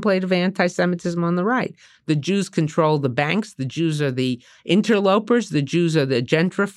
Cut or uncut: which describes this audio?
uncut